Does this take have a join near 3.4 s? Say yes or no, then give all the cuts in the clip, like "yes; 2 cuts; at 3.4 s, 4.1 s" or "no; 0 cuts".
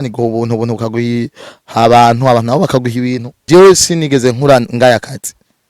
yes; 1 cut; at 3.4 s